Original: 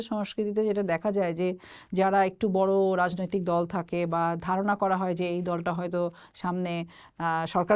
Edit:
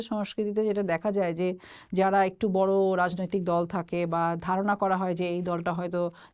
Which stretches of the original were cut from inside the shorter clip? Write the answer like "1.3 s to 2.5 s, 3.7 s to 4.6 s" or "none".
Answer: none